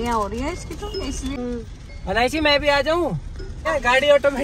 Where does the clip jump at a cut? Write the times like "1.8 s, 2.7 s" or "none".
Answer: 1.3 s, 3.7 s